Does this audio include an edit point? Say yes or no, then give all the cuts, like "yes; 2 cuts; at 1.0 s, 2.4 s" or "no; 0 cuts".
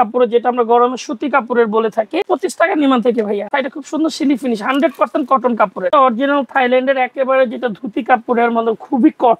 yes; 3 cuts; at 2.3 s, 3.5 s, 5.9 s